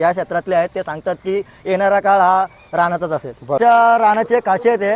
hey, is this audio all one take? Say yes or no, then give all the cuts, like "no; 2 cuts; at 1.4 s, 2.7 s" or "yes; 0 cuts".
no; 1 cut; at 3.6 s